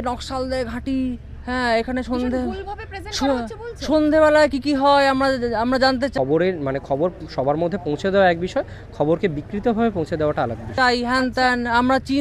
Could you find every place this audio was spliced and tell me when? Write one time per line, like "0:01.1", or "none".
0:06.1
0:10.7